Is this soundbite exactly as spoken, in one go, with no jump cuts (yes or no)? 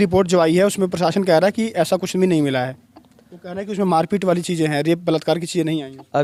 yes